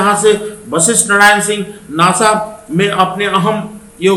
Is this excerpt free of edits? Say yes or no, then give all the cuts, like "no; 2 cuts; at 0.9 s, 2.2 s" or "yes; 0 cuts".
yes; 0 cuts